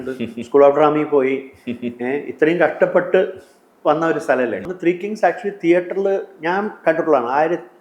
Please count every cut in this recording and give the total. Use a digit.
1